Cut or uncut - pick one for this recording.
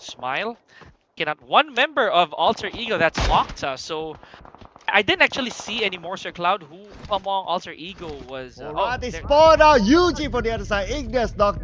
cut